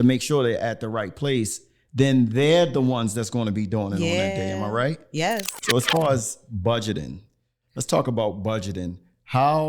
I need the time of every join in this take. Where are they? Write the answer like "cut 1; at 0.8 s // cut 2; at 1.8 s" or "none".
cut 1; at 5.5 s